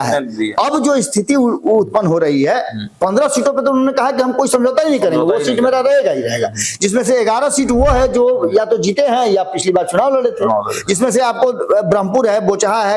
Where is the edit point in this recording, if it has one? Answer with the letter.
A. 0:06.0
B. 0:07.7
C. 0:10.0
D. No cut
D